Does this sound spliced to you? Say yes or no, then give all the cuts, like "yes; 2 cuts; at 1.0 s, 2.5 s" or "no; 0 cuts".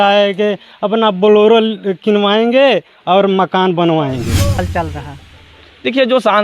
yes; 1 cut; at 4.6 s